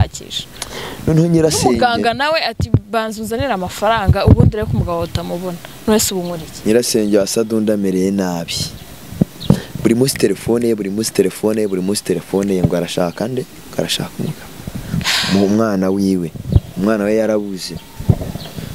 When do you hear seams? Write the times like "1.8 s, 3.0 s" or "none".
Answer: none